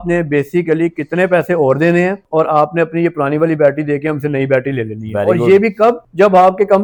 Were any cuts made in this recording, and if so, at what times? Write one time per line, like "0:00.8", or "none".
none